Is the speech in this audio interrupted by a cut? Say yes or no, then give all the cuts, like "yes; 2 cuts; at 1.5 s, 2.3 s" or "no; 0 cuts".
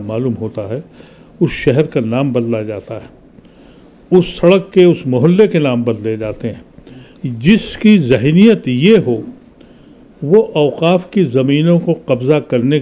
no; 0 cuts